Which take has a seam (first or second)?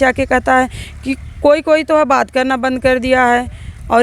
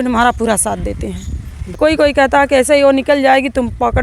second